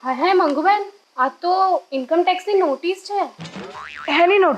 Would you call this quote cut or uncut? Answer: cut